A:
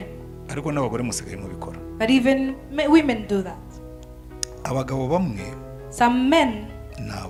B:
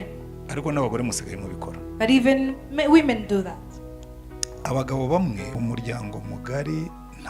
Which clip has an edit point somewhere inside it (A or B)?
B